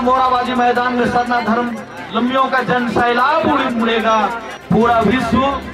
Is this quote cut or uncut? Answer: cut